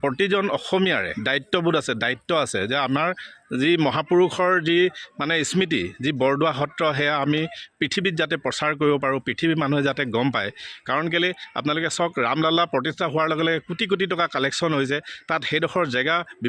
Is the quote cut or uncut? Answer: cut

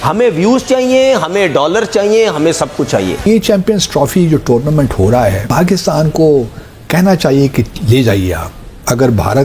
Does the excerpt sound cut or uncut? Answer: cut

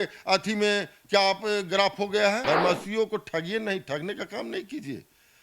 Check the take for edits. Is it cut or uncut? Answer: cut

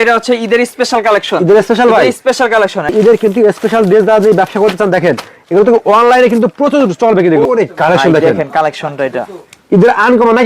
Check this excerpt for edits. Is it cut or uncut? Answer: cut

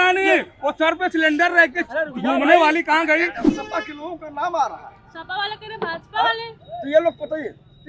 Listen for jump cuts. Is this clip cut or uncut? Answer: cut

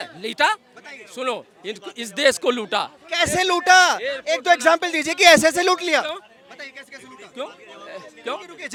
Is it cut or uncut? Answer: uncut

